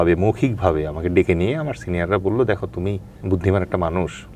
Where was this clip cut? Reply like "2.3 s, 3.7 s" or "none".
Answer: 3.1 s